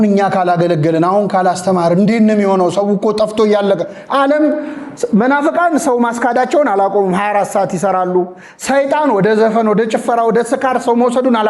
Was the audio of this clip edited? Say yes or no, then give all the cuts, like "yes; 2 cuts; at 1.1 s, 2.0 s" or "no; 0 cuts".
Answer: no; 0 cuts